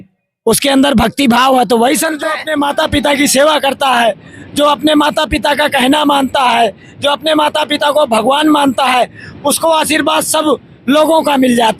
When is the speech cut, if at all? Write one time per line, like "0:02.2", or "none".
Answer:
0:02.4